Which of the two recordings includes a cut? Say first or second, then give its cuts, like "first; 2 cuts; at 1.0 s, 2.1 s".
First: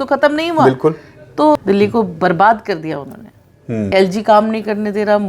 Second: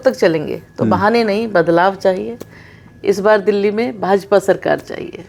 first; 2 cuts; at 1.6 s, 3.9 s